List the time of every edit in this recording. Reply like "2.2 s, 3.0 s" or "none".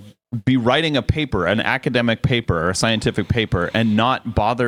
none

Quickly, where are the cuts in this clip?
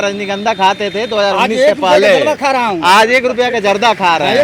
none

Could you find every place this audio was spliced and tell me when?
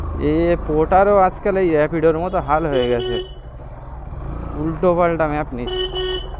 none

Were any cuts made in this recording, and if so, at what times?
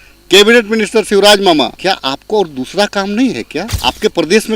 1.8 s, 3.6 s

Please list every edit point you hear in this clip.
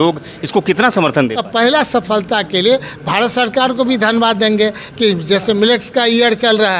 1.4 s

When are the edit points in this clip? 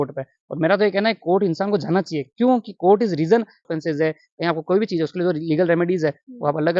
3.7 s

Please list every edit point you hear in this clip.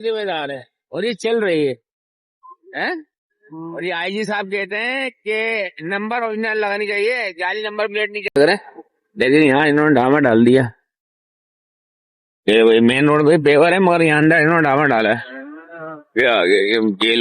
8.4 s

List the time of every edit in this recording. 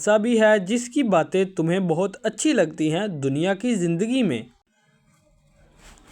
none

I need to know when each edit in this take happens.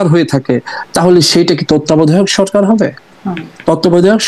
none

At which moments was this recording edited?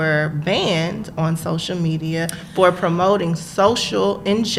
none

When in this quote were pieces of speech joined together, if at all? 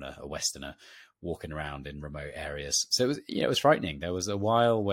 2.9 s

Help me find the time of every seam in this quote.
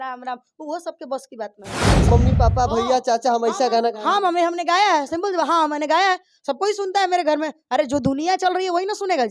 2.0 s

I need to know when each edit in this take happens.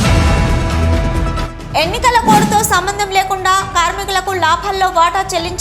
1.5 s

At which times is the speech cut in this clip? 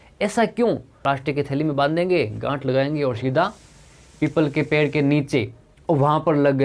0.9 s

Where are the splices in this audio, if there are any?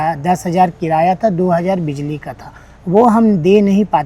none

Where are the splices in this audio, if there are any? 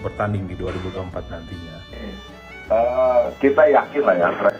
1.9 s

